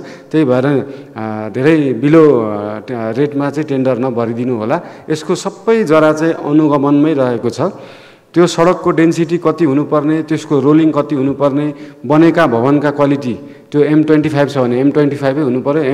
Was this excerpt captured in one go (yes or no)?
yes